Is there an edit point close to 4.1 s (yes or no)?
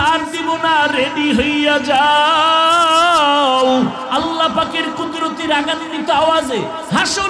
yes